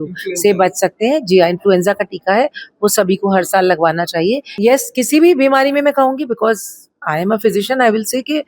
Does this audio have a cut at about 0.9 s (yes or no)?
no